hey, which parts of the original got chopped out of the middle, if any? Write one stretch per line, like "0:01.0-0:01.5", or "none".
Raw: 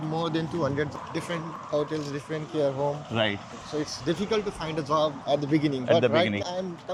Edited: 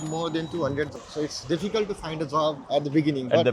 0:01.0-0:03.6